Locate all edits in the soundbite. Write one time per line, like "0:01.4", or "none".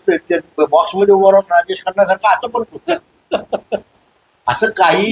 none